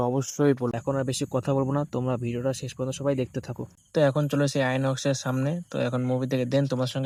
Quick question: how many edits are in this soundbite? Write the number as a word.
zero